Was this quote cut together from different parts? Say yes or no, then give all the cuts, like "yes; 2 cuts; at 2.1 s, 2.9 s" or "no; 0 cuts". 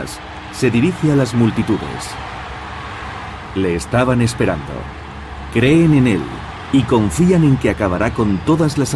no; 0 cuts